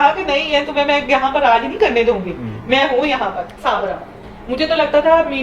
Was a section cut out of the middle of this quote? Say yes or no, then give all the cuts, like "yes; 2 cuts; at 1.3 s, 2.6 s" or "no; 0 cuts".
yes; 1 cut; at 3.5 s